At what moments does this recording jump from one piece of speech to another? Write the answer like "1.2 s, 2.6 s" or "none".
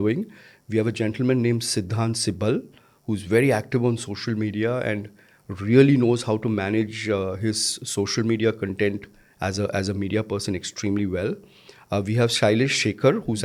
none